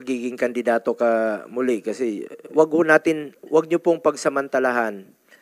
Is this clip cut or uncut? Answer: cut